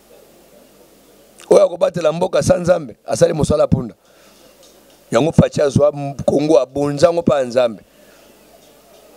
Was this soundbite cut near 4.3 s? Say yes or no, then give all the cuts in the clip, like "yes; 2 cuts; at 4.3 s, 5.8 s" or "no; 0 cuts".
no; 0 cuts